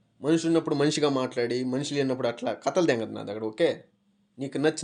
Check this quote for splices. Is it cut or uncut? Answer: uncut